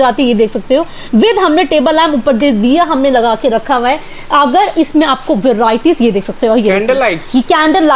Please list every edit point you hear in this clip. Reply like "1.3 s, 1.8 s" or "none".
none